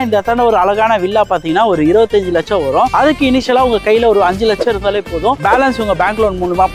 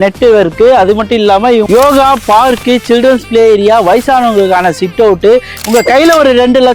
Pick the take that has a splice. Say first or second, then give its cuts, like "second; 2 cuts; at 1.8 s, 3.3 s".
second; 1 cut; at 5.6 s